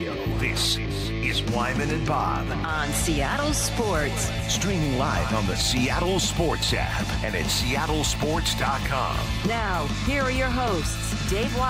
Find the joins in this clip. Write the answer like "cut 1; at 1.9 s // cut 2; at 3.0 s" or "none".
none